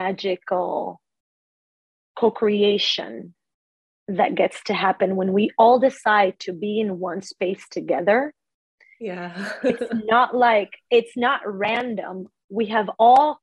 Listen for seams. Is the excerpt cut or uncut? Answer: uncut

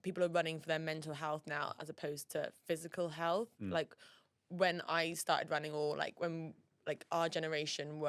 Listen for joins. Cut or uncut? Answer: uncut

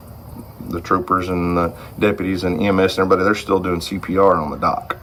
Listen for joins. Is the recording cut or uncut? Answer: uncut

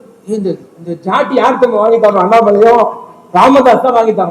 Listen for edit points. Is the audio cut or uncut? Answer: uncut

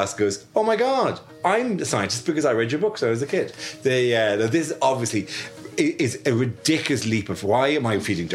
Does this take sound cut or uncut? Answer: uncut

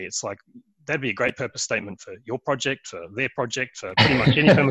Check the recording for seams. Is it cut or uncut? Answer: uncut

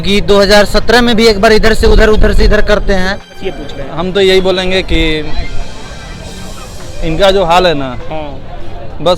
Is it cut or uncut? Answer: cut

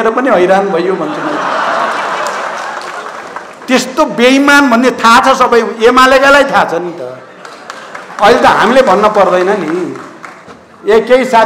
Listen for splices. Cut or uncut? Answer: uncut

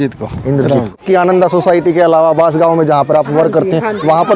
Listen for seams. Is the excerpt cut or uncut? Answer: cut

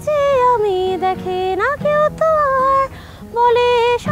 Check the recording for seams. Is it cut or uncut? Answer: uncut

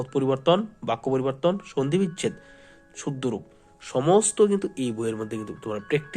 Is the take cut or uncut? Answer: uncut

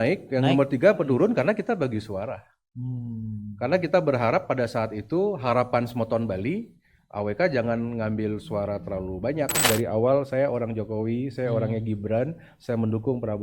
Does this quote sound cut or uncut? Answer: cut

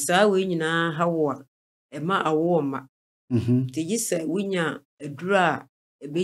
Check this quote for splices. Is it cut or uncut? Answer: uncut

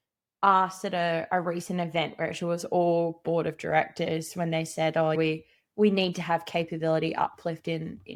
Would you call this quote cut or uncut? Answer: uncut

